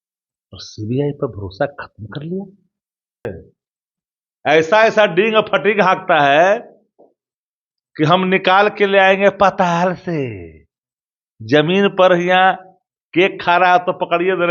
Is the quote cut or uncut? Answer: cut